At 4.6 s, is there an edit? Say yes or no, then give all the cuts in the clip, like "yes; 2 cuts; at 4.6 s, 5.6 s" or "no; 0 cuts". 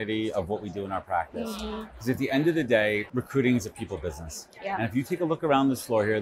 no; 1 cut; at 3.1 s